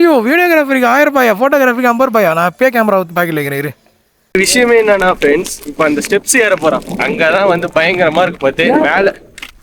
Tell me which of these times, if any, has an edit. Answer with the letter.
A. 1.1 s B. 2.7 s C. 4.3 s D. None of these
C